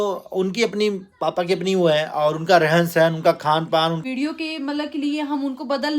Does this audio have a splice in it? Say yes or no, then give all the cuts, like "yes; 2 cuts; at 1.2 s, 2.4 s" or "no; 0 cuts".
yes; 1 cut; at 4.0 s